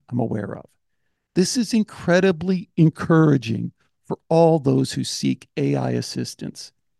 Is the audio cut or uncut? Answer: uncut